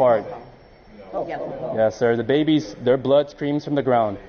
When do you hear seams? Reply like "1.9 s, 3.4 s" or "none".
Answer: none